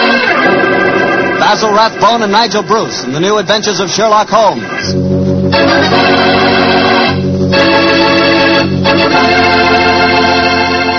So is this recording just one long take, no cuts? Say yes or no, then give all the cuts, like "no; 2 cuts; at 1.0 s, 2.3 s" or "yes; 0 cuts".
yes; 0 cuts